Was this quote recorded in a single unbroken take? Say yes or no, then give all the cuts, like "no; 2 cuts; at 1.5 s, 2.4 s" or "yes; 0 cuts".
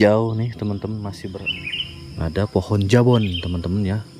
no; 1 cut; at 1.4 s